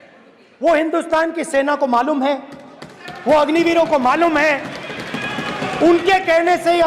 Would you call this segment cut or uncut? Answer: uncut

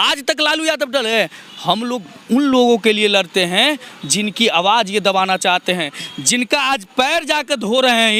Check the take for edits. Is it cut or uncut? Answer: uncut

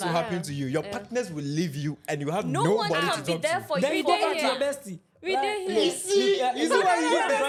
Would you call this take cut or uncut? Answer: uncut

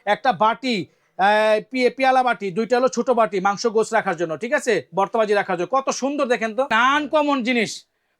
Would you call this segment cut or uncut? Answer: cut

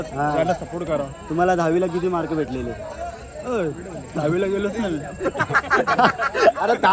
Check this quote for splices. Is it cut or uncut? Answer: uncut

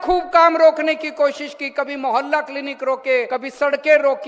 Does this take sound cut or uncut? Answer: cut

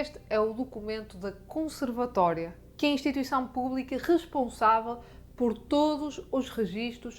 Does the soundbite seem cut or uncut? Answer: uncut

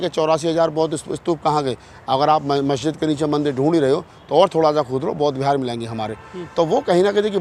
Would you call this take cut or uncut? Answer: uncut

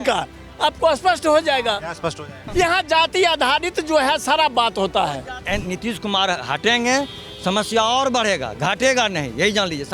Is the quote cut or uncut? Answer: cut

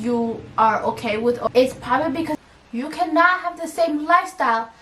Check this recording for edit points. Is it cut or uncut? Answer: cut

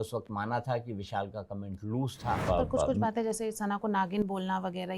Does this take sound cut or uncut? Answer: cut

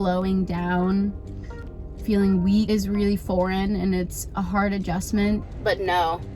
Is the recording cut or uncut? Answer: cut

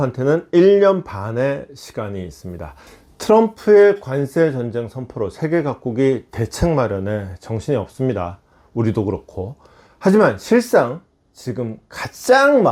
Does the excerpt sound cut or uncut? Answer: cut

